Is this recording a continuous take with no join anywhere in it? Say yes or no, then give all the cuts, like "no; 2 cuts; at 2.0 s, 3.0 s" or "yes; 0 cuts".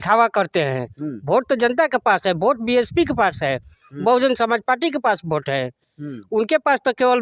no; 1 cut; at 0.9 s